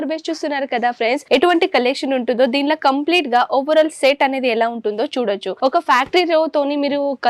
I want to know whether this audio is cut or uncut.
cut